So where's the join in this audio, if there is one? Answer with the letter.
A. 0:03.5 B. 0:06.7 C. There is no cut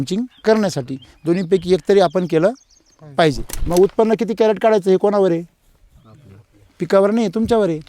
A